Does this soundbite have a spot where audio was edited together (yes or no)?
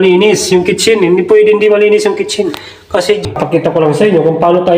yes